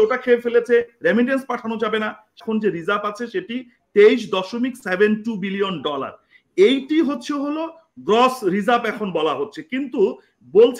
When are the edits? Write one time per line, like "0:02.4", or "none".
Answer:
0:02.3